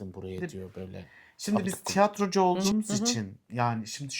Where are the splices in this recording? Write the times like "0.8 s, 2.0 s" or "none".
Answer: 1.6 s